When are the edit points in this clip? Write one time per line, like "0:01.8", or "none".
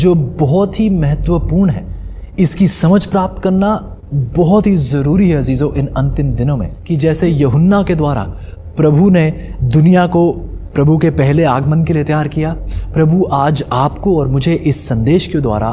0:06.7